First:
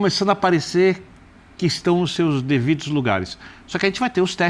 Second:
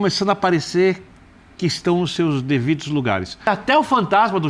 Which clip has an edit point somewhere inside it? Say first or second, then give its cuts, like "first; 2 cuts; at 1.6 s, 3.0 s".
second; 1 cut; at 3.5 s